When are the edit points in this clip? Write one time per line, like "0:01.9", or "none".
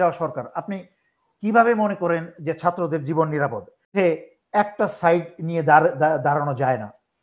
0:03.9